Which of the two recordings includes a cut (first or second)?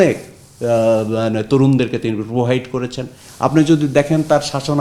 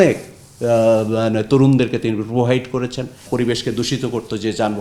second